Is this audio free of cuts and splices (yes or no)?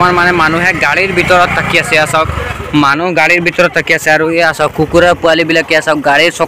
yes